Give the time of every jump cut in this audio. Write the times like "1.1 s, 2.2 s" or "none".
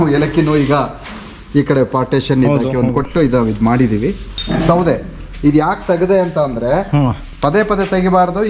4.3 s

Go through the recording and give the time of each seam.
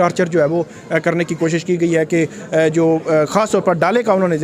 none

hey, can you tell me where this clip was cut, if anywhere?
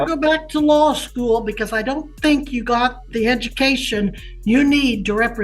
none

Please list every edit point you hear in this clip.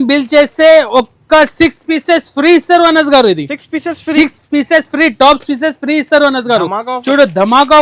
none

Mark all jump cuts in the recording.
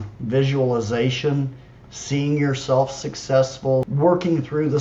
3.9 s

